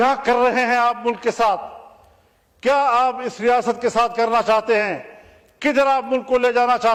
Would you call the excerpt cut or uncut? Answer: uncut